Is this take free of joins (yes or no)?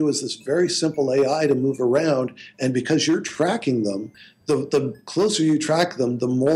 yes